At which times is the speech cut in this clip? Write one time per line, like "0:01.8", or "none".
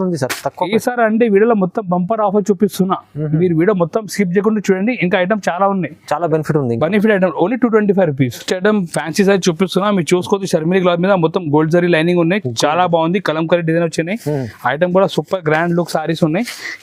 none